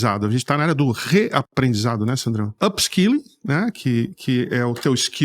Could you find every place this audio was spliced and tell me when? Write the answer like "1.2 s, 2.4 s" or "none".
2.5 s